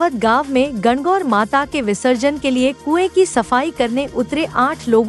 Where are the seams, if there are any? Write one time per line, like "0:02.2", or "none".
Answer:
none